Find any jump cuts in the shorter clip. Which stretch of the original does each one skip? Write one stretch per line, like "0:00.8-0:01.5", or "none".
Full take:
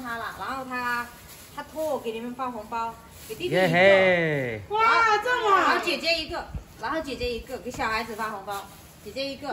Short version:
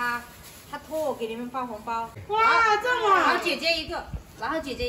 0:03.0-0:04.6